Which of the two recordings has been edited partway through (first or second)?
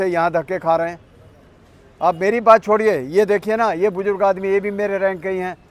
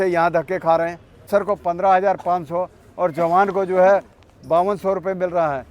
second